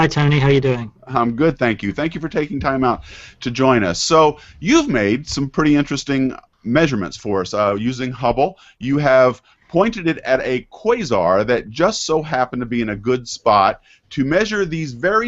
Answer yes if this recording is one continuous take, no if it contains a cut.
no